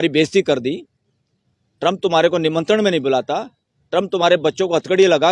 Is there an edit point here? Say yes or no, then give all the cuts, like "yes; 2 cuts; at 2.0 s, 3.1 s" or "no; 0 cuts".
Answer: no; 0 cuts